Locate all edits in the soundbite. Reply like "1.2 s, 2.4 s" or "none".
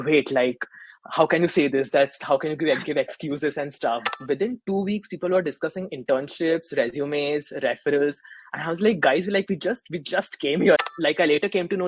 4.1 s, 10.8 s

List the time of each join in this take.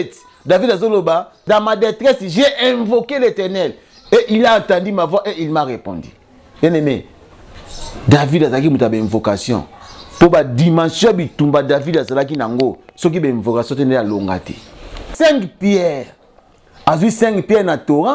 1.3 s, 15.1 s

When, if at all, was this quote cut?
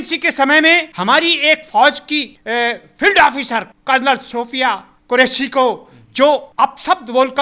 0.9 s, 2.3 s, 3.7 s, 4.9 s, 6.5 s

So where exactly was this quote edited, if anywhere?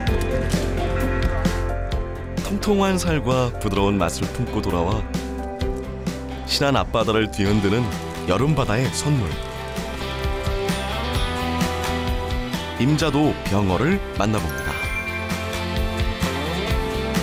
none

